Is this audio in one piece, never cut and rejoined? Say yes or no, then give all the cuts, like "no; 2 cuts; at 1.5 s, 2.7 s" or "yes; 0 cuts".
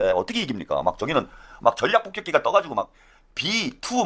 yes; 0 cuts